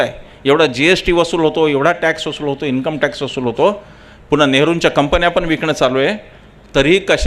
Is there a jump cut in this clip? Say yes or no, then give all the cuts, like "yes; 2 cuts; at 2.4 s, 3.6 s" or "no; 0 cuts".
no; 0 cuts